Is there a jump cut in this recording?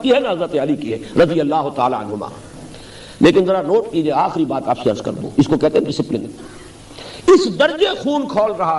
no; 0 cuts

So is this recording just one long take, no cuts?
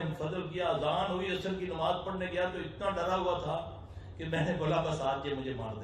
yes; 0 cuts

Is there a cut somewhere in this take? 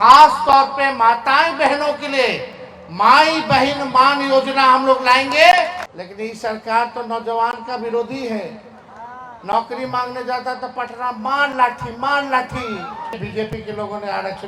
yes; 2 cuts; at 5.9 s, 13.2 s

